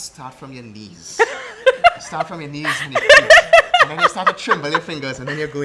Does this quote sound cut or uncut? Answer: uncut